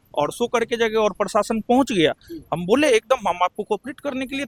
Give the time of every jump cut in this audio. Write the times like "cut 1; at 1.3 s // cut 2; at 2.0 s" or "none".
none

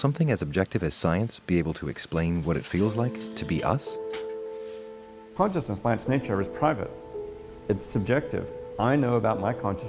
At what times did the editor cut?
cut 1; at 5.0 s

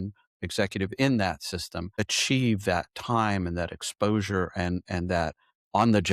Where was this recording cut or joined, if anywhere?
cut 1; at 2.0 s

